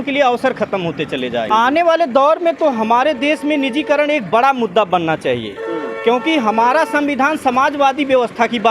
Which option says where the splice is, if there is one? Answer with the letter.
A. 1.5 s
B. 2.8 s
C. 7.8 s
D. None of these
A